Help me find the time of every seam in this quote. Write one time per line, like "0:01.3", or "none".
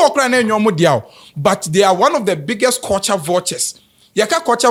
none